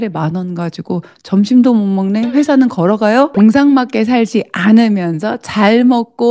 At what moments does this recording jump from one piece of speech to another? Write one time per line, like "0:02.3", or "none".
0:03.3

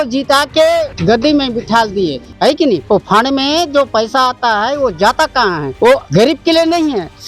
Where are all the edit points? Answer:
none

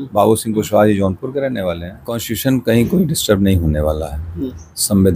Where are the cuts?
0:02.3

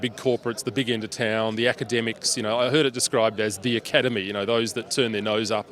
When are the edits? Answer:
none

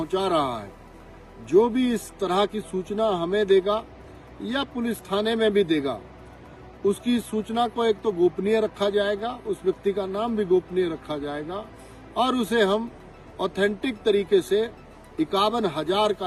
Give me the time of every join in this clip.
none

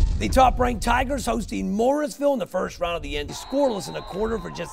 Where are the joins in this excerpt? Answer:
none

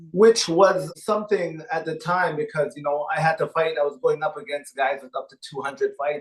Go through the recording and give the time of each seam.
0:01.0

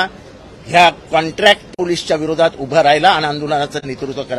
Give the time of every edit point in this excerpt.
none

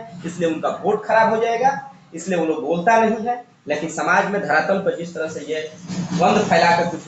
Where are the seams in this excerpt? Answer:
none

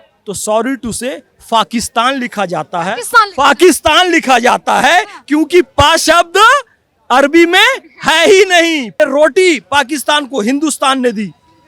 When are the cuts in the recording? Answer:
0:08.9

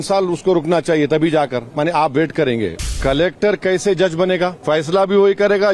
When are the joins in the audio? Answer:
0:02.9
0:04.6

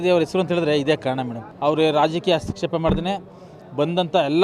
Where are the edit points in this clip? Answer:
0:01.5

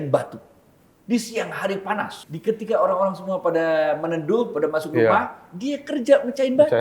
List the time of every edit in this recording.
0:02.3

